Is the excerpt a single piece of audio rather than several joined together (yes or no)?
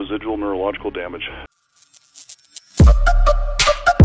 no